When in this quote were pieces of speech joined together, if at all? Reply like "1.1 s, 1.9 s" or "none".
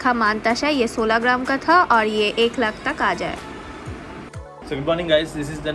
none